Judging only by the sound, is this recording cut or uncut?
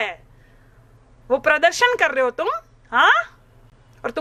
uncut